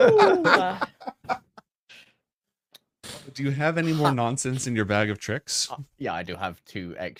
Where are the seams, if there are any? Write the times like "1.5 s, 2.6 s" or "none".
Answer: none